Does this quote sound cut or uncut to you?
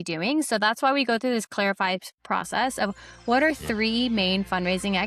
uncut